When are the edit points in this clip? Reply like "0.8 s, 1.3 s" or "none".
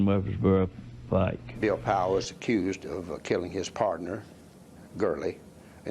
1.5 s